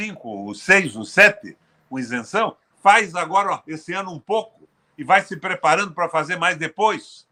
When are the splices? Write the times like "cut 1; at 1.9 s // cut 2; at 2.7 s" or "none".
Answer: none